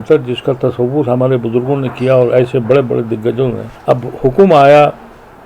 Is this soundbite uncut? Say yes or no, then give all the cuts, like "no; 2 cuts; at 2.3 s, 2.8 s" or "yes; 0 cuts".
no; 1 cut; at 3.7 s